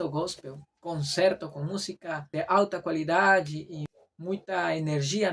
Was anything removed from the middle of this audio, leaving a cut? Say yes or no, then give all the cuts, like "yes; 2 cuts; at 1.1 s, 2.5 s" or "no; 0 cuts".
yes; 2 cuts; at 2.2 s, 3.8 s